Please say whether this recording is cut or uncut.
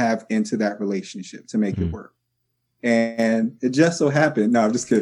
uncut